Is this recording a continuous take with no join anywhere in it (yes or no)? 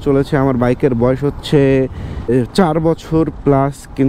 no